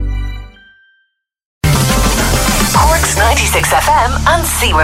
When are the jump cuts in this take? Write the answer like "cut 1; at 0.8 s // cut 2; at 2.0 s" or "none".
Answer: cut 1; at 1.6 s